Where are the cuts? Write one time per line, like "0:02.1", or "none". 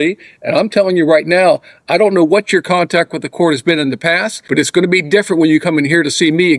0:04.3